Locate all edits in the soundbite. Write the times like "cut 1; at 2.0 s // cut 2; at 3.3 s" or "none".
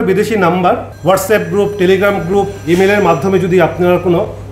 cut 1; at 0.9 s